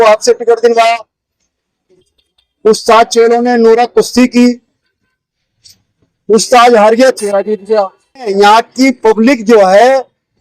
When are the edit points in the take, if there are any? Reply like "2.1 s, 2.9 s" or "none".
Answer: 8.3 s